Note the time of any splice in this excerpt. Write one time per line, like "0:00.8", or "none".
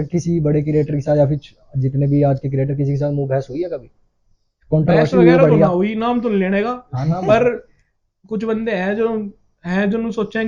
none